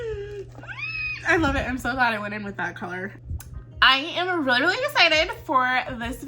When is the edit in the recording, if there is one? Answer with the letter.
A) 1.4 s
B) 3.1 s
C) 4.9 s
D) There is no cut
B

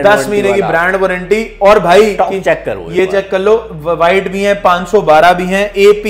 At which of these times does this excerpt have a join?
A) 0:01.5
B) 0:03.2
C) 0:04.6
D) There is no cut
D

